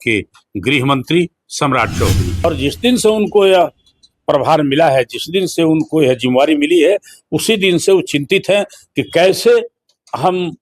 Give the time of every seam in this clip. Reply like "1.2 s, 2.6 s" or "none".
2.4 s